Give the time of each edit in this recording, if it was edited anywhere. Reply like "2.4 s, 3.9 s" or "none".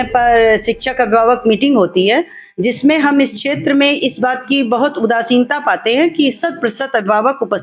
none